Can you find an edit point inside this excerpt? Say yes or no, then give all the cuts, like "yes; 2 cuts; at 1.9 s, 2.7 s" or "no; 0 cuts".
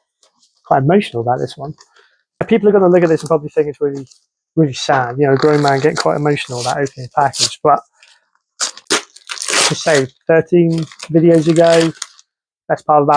yes; 2 cuts; at 2.4 s, 8.8 s